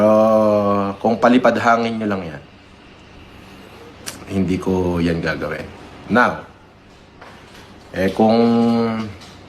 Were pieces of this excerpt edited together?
yes; 1 cut; at 3.9 s

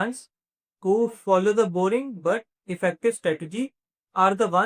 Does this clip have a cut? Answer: no; 0 cuts

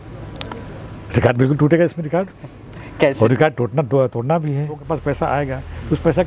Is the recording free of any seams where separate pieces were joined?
no; 1 cut; at 4.8 s

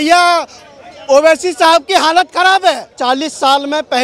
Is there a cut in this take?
yes; 1 cut; at 3.0 s

